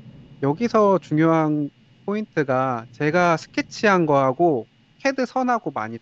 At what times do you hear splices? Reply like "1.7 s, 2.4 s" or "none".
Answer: none